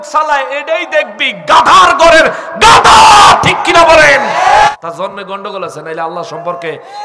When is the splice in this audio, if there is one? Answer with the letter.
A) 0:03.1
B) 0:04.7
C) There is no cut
B